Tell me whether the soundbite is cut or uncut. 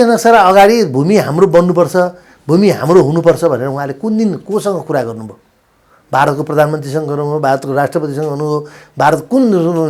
uncut